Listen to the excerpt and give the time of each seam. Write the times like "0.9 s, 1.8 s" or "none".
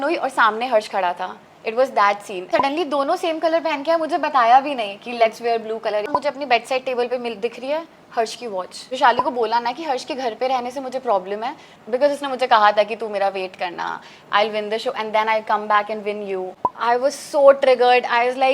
2.5 s, 6.1 s, 8.9 s, 11.7 s, 16.6 s